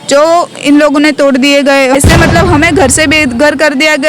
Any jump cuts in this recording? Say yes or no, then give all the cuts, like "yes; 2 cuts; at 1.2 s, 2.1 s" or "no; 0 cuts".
yes; 1 cut; at 1.9 s